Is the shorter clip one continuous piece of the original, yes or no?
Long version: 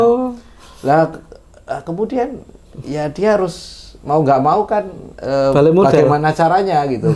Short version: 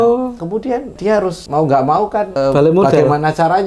no